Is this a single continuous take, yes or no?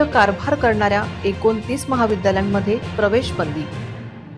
yes